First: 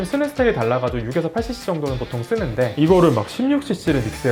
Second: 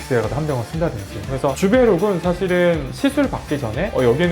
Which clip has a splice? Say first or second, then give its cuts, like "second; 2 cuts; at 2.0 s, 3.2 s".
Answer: second; 1 cut; at 1.3 s